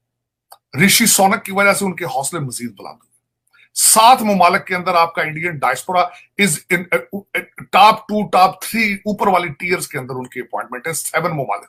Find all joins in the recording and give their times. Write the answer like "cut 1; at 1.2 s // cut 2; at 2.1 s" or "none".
none